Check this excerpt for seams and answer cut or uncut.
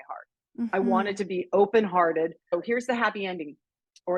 cut